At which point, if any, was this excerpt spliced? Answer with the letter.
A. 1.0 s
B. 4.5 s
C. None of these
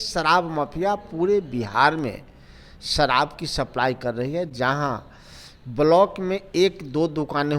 C